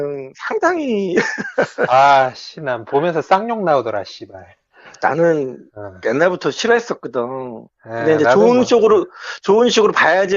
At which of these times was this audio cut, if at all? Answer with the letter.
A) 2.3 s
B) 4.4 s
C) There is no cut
A